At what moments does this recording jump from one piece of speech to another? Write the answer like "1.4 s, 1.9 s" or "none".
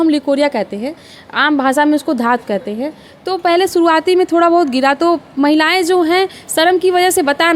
none